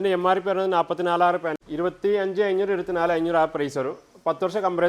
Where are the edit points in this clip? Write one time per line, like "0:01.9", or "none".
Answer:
0:01.6